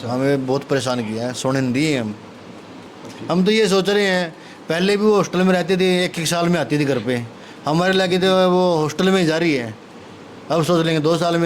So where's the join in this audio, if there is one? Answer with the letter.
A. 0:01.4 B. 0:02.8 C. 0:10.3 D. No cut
B